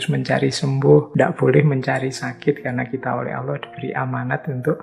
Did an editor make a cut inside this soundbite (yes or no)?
yes